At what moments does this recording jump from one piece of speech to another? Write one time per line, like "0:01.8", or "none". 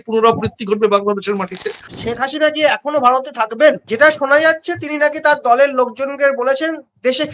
0:01.9